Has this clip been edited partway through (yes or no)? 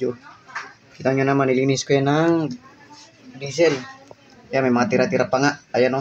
no